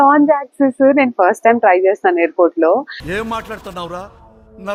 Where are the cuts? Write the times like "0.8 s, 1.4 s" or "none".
none